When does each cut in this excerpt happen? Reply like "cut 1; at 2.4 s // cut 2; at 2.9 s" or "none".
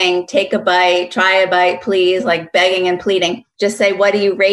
cut 1; at 3.4 s